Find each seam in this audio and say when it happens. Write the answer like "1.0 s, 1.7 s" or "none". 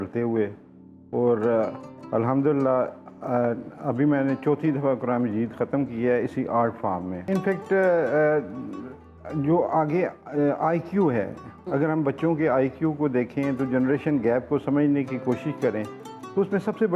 7.3 s